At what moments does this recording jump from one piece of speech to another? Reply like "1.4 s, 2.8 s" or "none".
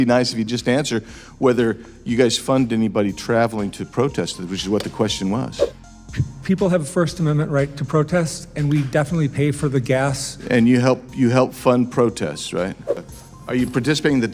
13.0 s